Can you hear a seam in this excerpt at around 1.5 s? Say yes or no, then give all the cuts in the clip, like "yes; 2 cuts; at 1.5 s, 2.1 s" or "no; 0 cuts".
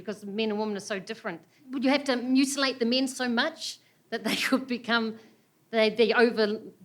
yes; 1 cut; at 1.5 s